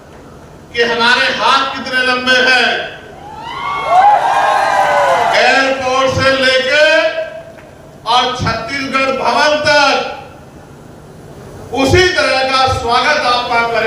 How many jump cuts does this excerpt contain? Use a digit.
0